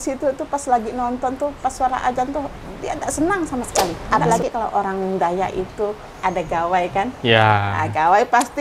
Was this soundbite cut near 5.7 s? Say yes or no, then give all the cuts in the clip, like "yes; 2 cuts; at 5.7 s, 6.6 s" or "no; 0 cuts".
no; 1 cut; at 4.0 s